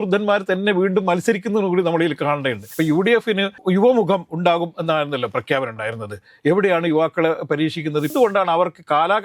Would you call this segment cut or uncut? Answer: cut